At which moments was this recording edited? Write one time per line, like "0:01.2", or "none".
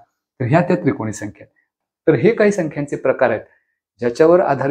0:01.6